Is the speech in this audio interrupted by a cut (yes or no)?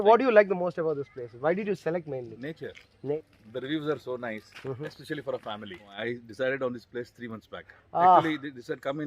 yes